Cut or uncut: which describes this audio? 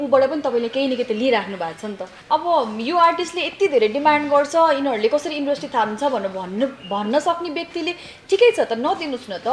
cut